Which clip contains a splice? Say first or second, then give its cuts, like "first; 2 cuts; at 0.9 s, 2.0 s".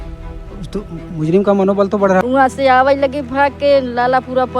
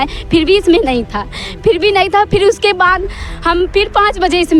first; 1 cut; at 2.2 s